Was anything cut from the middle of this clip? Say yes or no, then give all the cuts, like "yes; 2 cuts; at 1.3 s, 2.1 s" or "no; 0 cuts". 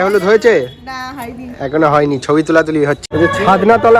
yes; 1 cut; at 3.0 s